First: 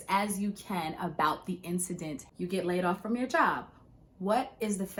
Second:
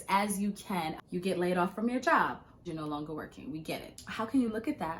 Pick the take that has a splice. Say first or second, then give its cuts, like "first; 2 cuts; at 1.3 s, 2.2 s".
second; 3 cuts; at 1.0 s, 2.7 s, 4.2 s